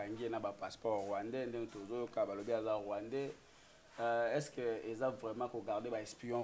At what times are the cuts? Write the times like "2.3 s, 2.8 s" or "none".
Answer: none